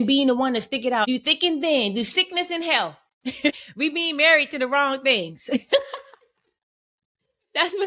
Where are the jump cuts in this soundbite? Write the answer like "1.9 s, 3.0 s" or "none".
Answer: 1.1 s, 3.6 s